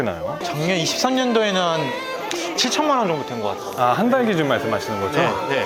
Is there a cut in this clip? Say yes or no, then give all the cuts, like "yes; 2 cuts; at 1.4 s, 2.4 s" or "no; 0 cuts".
no; 0 cuts